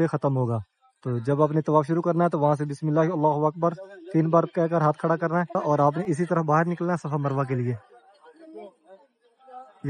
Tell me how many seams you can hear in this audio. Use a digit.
1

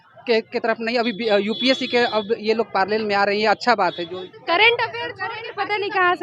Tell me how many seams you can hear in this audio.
1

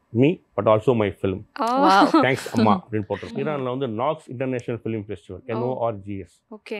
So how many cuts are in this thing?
1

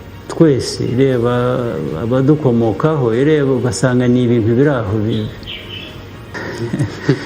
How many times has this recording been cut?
1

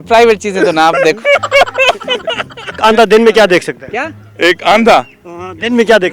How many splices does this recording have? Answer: 1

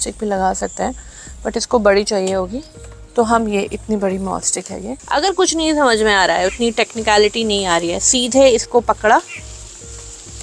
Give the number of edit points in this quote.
1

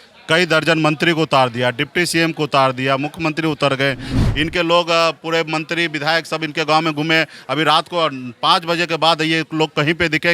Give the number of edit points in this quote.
1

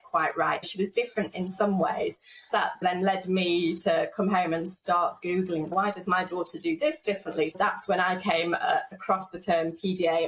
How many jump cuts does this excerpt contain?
3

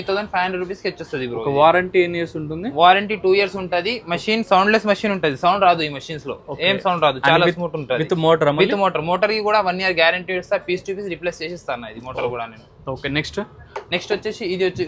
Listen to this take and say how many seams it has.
0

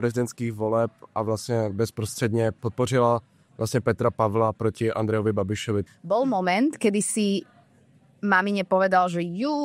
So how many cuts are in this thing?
2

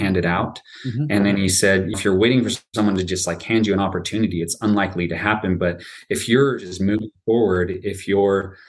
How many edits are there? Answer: 1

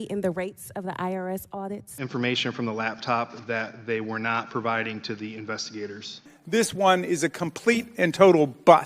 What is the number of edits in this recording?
2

